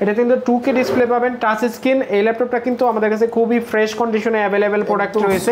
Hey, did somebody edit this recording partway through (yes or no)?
no